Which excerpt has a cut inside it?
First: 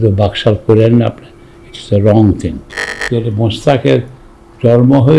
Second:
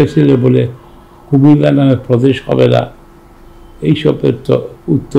first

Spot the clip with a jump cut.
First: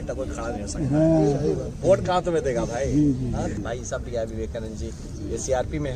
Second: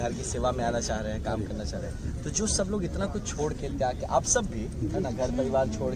first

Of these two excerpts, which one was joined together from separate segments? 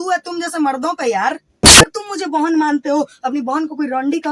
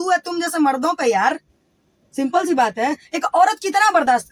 first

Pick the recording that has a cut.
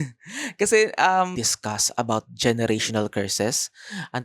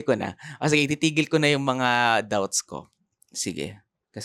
first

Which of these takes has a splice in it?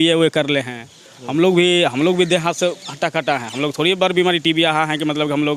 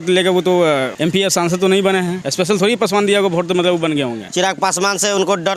second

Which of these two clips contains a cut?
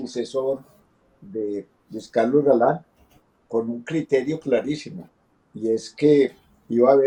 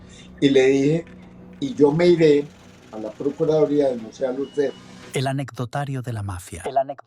second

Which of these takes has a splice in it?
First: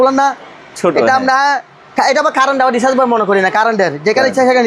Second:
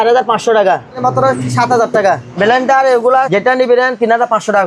second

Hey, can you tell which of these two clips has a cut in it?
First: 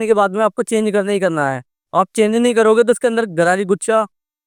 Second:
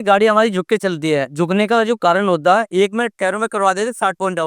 second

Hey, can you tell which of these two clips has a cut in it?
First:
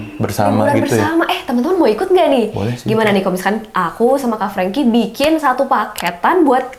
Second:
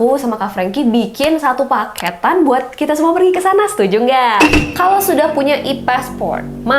second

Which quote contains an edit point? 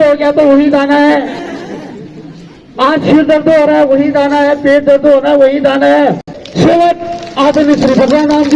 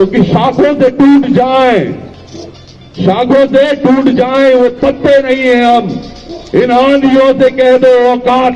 first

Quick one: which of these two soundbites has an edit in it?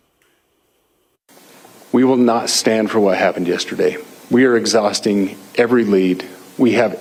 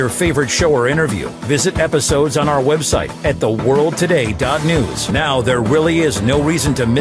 second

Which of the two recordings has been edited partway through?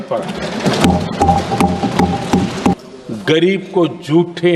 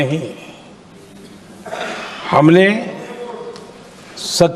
first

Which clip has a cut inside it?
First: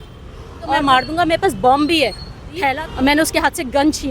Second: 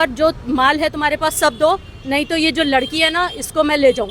first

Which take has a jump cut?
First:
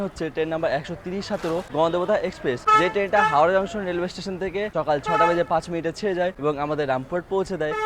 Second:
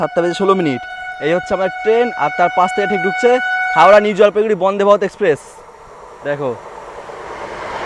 first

